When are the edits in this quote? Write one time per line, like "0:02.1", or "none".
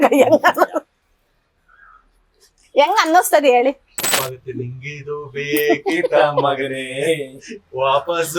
0:04.1